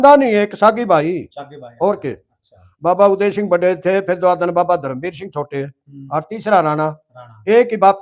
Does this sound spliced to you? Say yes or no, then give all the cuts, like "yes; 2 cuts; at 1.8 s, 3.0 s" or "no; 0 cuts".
no; 0 cuts